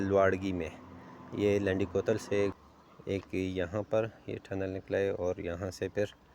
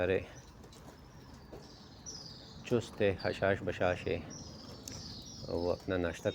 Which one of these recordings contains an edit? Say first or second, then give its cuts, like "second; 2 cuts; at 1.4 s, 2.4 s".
first; 1 cut; at 2.6 s